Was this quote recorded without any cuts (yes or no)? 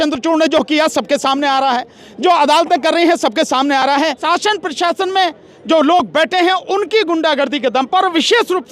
no